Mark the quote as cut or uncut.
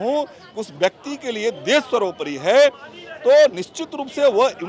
uncut